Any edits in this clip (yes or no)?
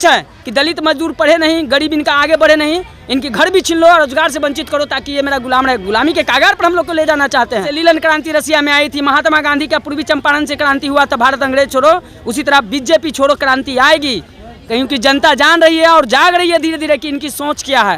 yes